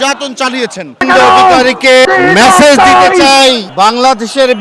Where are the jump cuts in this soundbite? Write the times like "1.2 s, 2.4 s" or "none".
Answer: 1.0 s, 2.1 s, 3.7 s